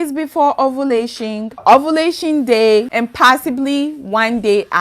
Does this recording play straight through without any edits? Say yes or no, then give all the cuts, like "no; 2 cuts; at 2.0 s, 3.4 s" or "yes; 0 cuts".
no; 2 cuts; at 1.6 s, 2.9 s